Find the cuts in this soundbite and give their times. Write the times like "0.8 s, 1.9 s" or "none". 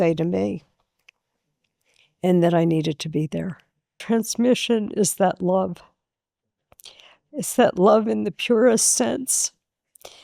4.0 s